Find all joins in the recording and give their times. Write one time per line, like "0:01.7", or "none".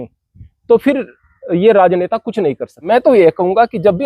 0:02.8